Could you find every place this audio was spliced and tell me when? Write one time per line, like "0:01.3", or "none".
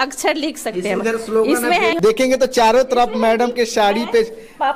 0:01.9